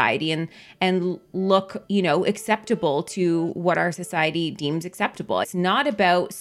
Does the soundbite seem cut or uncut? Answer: cut